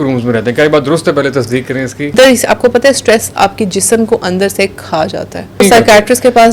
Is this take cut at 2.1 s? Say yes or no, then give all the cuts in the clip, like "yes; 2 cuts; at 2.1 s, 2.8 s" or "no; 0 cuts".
yes; 2 cuts; at 2.1 s, 5.6 s